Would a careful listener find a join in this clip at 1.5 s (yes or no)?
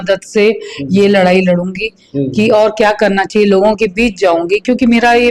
no